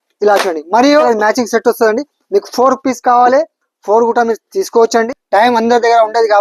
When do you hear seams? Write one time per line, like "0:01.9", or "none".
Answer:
0:01.1
0:05.2